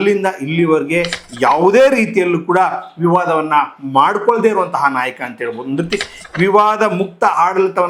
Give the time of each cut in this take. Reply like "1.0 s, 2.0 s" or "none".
none